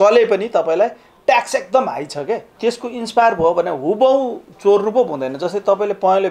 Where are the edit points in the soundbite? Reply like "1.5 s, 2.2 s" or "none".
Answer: 2.6 s